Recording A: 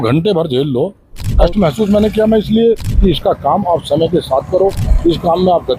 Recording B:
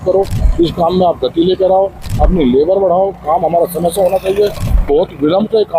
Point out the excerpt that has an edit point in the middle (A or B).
A